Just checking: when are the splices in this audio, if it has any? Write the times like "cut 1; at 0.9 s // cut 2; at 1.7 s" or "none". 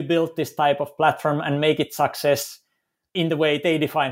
cut 1; at 3.1 s